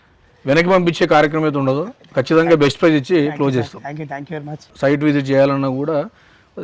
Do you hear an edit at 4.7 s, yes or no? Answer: yes